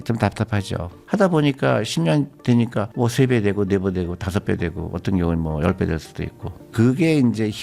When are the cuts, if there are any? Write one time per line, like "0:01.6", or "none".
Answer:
0:01.0